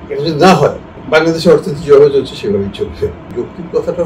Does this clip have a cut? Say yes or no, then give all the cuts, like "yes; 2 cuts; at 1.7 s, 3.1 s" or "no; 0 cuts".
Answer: yes; 2 cuts; at 0.9 s, 3.3 s